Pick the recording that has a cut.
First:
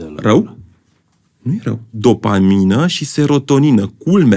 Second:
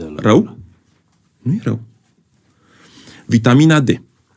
first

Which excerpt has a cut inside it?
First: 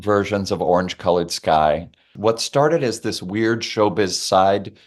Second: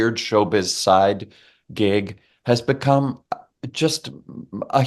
first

